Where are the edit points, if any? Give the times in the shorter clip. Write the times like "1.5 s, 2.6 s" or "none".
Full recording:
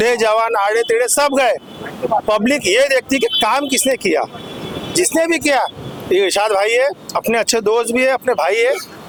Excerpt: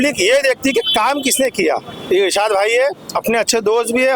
1.9 s